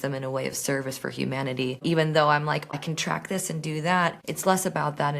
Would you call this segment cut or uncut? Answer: cut